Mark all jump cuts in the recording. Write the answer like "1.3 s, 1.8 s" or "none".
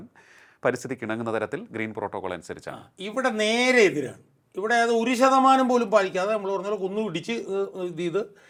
none